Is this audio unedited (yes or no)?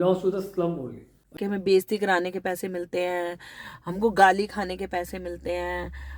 no